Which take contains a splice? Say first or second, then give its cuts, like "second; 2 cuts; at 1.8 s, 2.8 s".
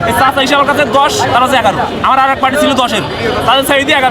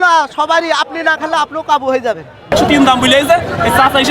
second; 1 cut; at 2.5 s